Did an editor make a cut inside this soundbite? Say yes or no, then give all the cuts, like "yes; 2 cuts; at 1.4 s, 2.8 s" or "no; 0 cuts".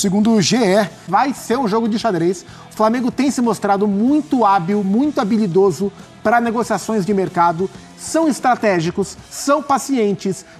yes; 1 cut; at 1.0 s